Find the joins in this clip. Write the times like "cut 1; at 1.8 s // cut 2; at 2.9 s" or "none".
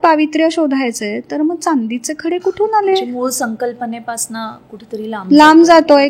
none